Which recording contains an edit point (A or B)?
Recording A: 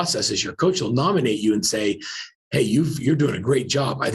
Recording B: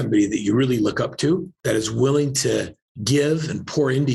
B